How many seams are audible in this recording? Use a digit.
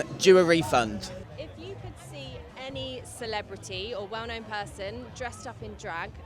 1